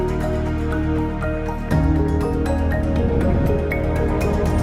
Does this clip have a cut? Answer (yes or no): no